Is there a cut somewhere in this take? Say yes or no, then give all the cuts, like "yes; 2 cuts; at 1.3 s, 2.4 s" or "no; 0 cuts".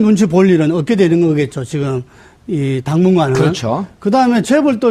yes; 1 cut; at 3.0 s